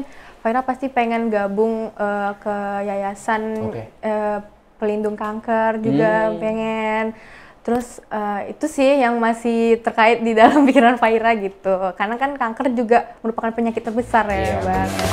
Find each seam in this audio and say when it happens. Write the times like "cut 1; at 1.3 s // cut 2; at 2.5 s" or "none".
none

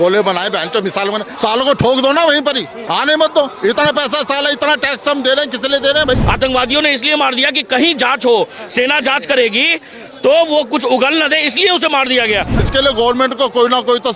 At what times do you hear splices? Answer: cut 1; at 1.3 s // cut 2; at 2.7 s // cut 3; at 6.2 s // cut 4; at 12.6 s

